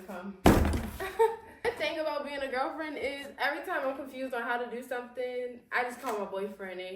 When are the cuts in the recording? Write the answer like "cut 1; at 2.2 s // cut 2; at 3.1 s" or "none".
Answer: cut 1; at 1.6 s

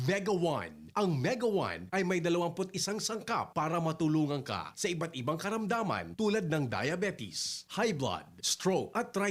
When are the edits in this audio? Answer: none

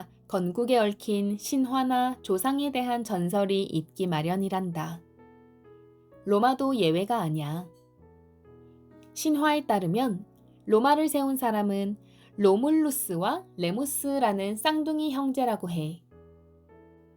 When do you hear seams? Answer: cut 1; at 16.1 s

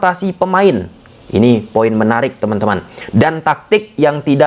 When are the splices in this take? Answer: none

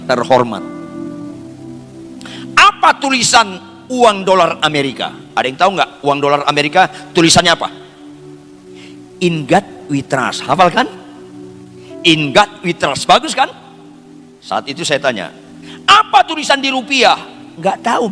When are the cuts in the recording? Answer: none

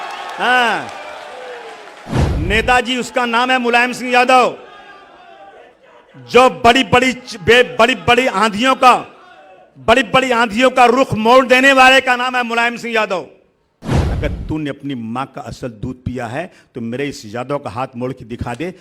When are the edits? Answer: cut 1; at 2.2 s // cut 2; at 14.0 s

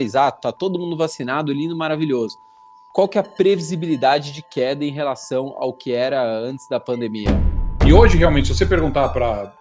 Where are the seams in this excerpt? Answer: cut 1; at 7.5 s

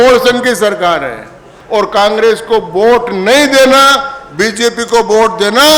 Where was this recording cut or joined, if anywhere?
cut 1; at 1.5 s

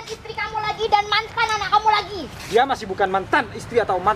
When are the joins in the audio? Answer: none

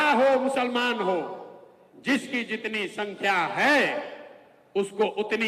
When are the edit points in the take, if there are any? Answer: none

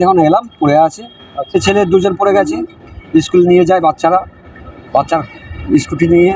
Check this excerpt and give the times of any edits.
cut 1; at 1.5 s

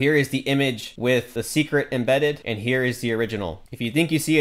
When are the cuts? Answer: none

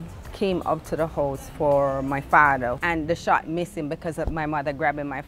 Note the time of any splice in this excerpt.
cut 1; at 2.8 s

